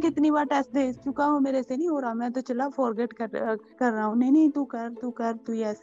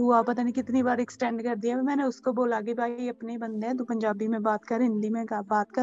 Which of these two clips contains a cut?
first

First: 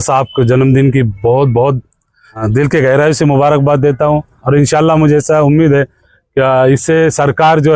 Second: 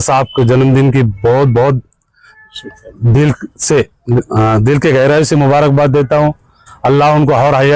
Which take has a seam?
first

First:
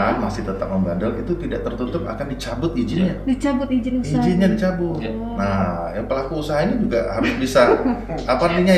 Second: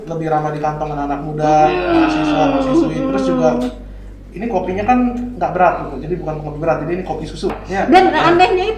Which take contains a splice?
second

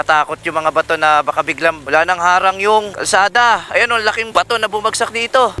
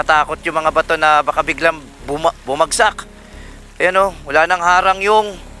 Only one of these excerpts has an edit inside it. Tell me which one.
first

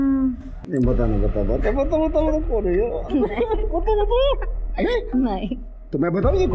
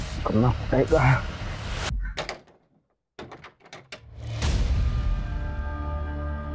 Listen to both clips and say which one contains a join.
second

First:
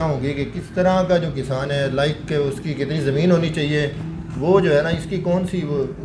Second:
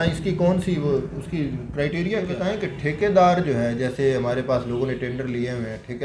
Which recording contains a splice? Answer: second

